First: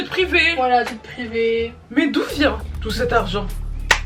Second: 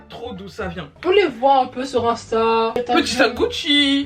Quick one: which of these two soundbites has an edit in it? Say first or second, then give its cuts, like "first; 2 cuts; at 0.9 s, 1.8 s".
second; 1 cut; at 2.7 s